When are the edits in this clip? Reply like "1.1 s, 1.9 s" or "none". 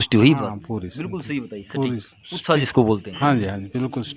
none